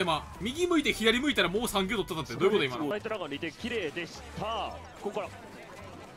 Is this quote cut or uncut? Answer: cut